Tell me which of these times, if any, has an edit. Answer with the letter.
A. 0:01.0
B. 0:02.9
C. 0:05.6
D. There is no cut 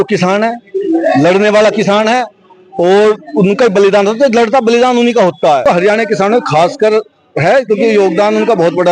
C